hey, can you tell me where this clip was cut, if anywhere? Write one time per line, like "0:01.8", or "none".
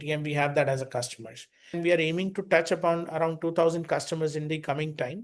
0:01.8